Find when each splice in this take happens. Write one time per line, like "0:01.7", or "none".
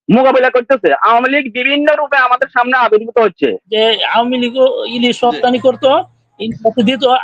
0:03.6